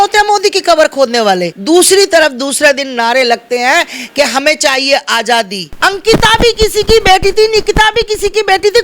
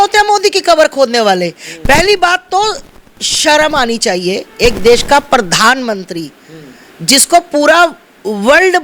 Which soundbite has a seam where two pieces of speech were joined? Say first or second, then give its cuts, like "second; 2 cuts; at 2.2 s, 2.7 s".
first; 2 cuts; at 1.5 s, 5.6 s